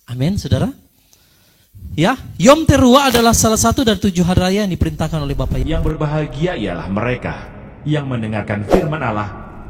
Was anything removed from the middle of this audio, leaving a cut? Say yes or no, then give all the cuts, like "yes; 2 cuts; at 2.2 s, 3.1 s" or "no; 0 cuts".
yes; 1 cut; at 5.6 s